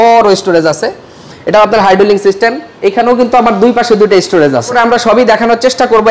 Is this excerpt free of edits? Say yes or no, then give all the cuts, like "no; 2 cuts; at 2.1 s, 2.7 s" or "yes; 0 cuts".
no; 1 cut; at 4.7 s